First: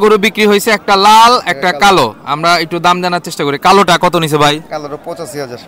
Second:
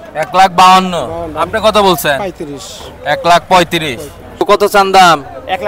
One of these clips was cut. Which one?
second; 1 cut; at 4.4 s

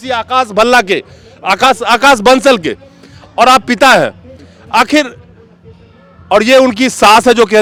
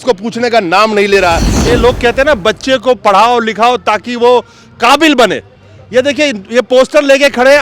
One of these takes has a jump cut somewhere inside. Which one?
second; 1 cut; at 1.6 s

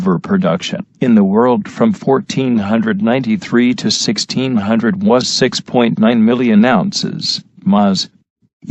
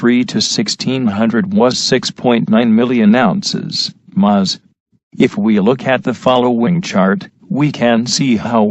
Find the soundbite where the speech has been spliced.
second; 1 cut; at 7.3 s

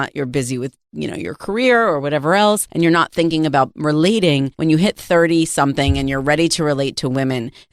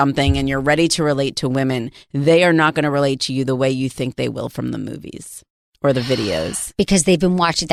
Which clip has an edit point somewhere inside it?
first; 2 cuts; at 2.7 s, 4.5 s

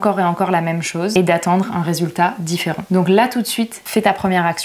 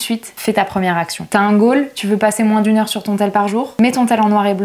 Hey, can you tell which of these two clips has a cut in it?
first; 1 cut; at 1.1 s

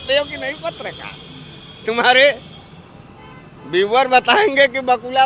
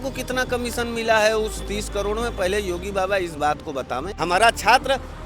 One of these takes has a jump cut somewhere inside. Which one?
second; 1 cut; at 4.1 s

